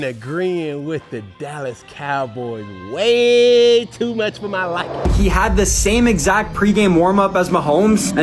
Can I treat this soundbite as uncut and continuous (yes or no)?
no